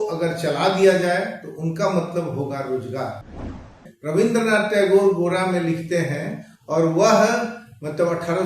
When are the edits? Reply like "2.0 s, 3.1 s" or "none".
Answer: 3.8 s